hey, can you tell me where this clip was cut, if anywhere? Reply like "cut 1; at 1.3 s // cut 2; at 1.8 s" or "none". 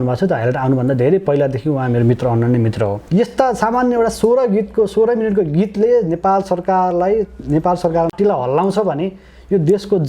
cut 1; at 3.0 s